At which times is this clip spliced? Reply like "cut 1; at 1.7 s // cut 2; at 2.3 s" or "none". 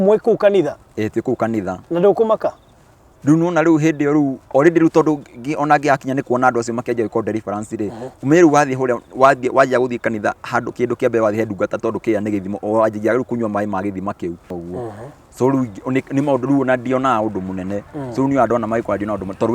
cut 1; at 14.5 s